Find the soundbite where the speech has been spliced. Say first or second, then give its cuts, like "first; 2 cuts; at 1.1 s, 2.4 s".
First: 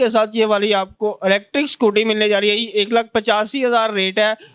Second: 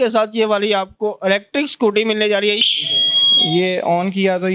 second; 1 cut; at 2.6 s